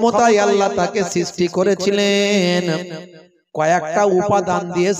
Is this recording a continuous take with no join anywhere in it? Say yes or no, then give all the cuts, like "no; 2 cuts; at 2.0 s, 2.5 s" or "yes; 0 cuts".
yes; 0 cuts